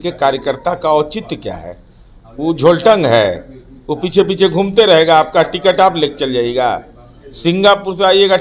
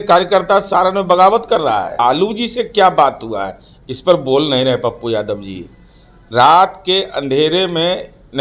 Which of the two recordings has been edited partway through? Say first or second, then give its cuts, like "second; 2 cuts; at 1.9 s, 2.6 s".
second; 1 cut; at 2.0 s